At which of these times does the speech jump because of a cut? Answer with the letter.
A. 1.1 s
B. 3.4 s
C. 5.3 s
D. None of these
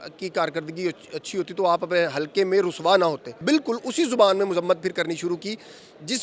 B